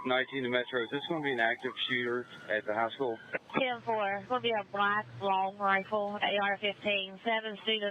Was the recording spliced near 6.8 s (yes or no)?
no